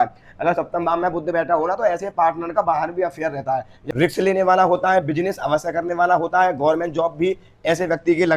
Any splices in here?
yes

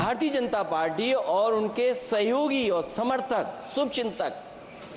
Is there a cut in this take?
no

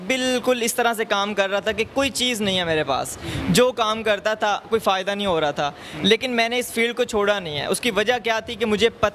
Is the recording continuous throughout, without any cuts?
yes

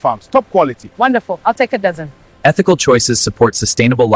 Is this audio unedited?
yes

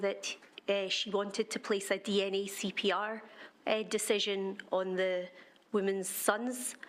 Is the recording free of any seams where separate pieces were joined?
yes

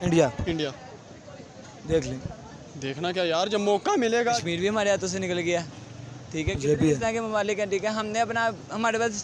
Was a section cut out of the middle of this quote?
yes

